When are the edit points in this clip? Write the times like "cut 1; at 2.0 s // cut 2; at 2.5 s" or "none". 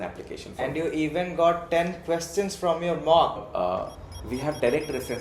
cut 1; at 3.4 s